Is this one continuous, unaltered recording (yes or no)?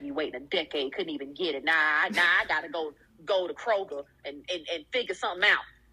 yes